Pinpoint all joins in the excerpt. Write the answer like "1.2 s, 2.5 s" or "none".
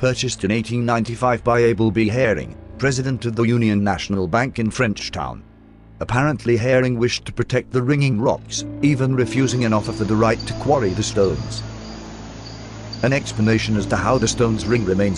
1.7 s